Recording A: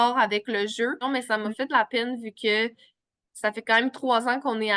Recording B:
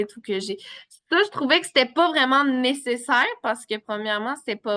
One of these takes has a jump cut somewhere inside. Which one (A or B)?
A